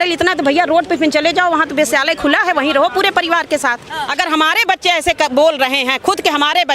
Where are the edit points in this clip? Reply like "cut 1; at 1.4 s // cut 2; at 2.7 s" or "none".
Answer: cut 1; at 4.0 s